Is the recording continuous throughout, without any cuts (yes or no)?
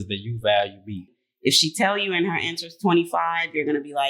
no